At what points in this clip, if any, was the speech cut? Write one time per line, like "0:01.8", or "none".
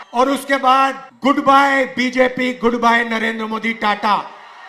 0:01.1